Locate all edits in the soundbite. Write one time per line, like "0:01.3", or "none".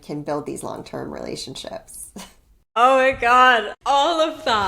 0:03.7